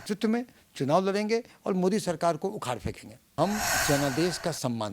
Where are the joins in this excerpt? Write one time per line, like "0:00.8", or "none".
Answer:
0:03.3

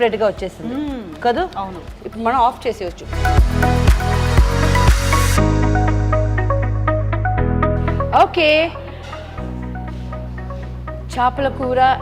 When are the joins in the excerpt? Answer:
0:03.1

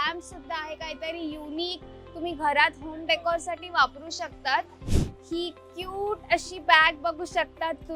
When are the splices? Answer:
0:04.8

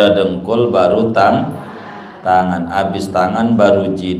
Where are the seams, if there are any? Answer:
none

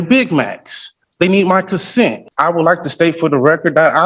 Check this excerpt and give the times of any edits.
0:02.3

